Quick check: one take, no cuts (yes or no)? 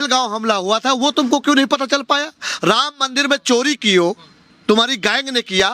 yes